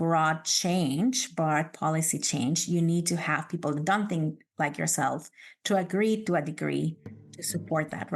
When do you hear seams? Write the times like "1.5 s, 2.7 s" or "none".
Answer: 7.2 s

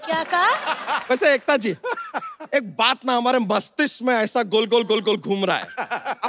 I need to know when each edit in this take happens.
1.0 s

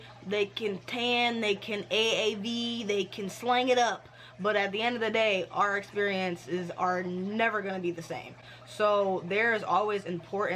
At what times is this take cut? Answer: none

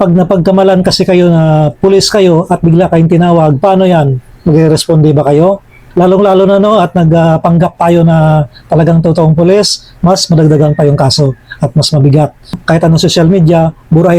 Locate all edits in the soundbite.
5.8 s, 12.6 s

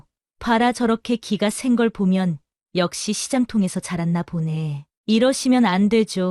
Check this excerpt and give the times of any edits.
4.8 s

